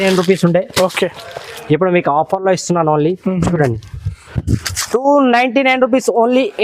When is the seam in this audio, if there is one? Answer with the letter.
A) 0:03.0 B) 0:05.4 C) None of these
C